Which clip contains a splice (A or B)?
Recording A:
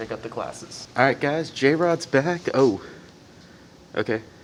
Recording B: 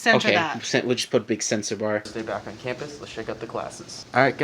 B